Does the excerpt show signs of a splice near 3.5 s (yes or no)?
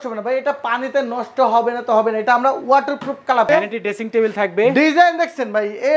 yes